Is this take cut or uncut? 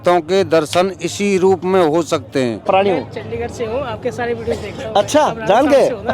cut